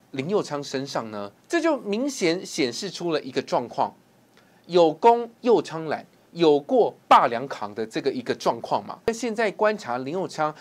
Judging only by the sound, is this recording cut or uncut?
cut